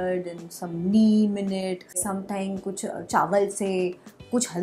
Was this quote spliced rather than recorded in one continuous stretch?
yes; 1 cut; at 2.0 s

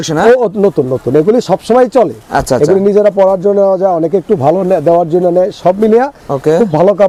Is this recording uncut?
yes; 0 cuts

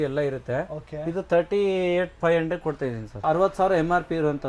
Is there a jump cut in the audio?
yes; 1 cut; at 3.1 s

